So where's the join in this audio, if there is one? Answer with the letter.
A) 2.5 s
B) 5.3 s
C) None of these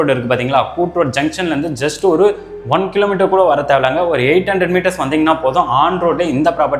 C